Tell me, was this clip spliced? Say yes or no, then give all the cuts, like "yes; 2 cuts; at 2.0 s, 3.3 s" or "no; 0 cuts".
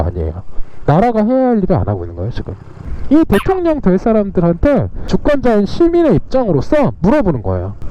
yes; 2 cuts; at 2.7 s, 4.9 s